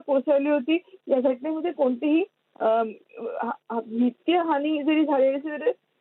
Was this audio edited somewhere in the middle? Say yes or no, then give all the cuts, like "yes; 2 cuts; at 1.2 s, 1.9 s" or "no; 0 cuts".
no; 0 cuts